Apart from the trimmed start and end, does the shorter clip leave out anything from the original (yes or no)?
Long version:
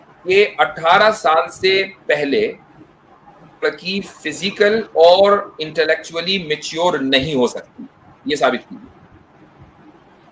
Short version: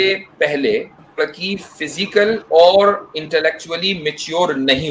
yes